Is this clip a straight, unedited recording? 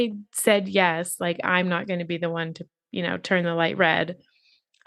yes; 0 cuts

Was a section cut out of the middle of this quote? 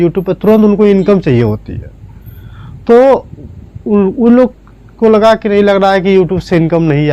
no; 0 cuts

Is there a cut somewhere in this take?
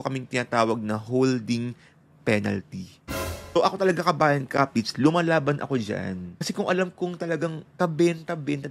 yes; 3 cuts; at 3.6 s, 6.4 s, 7.6 s

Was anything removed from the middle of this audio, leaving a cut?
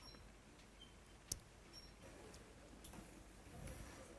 yes; 1 cut; at 2.0 s

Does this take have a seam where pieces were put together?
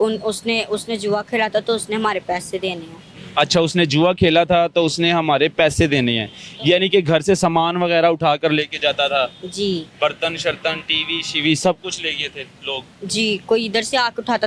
no; 0 cuts

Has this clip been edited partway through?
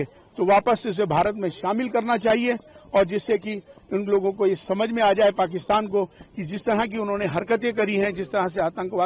no; 0 cuts

